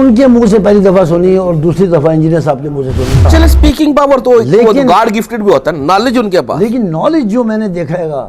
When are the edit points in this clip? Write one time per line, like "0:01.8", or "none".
0:03.2

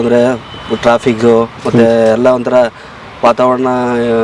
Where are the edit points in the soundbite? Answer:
none

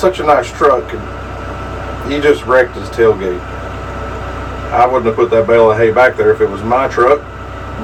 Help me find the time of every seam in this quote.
none

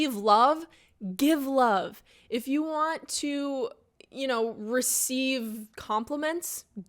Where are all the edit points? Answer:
0:05.7

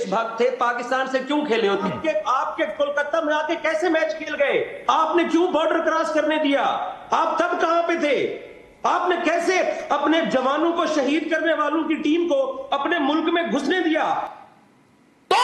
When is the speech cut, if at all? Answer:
0:01.8
0:14.3

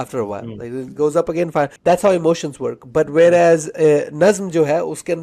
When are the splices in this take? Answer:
0:01.7

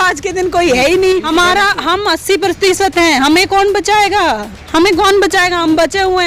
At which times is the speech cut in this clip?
0:01.3

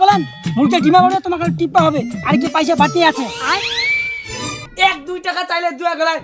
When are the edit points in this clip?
0:04.7

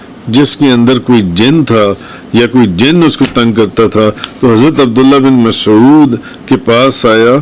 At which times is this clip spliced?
none

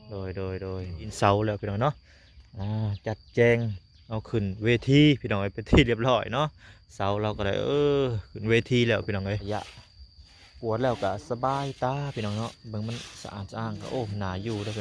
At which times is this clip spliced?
0:01.1
0:09.4

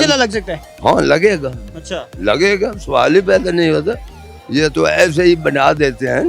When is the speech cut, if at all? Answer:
none

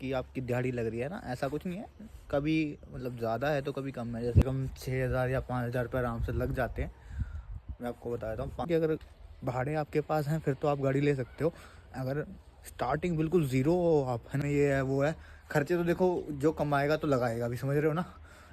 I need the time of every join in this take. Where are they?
0:04.4
0:08.7
0:14.4

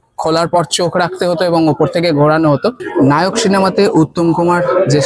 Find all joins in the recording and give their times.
0:02.8

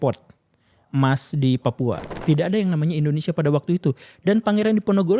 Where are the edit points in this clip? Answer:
0:02.1

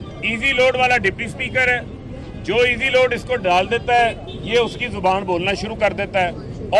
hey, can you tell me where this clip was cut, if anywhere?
none

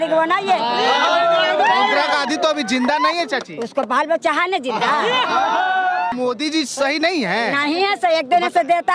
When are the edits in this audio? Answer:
0:06.1

